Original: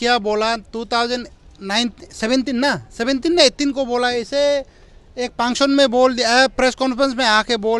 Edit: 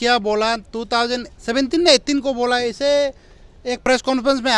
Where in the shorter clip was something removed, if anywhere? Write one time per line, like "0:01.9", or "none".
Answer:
0:01.4
0:03.8